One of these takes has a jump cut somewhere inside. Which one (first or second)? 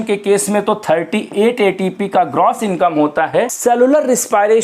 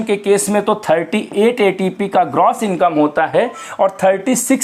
first